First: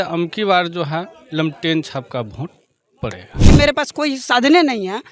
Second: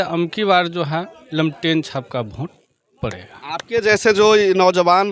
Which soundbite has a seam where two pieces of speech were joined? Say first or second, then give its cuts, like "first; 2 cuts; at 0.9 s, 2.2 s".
first; 1 cut; at 3.5 s